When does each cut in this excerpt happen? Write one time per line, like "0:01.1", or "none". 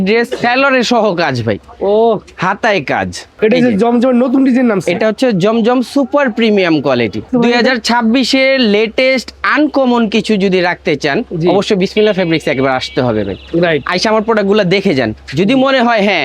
0:03.2
0:07.3